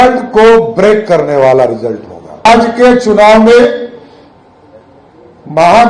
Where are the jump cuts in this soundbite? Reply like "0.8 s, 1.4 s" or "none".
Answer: 2.5 s